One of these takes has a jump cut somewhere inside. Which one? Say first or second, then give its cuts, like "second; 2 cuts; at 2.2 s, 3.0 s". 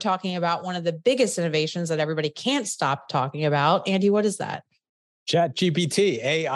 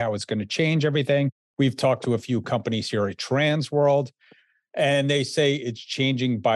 second; 1 cut; at 1.4 s